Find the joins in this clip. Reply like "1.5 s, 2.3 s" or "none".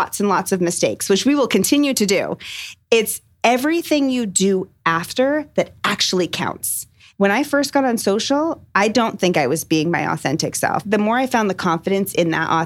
2.6 s, 7.0 s, 10.8 s